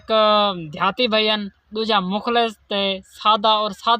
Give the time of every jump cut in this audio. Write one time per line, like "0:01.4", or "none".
none